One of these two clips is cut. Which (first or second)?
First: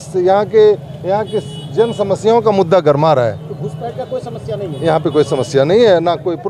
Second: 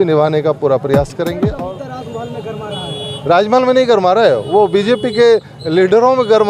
second